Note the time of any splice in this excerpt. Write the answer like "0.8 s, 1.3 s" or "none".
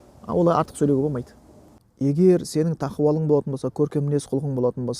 1.8 s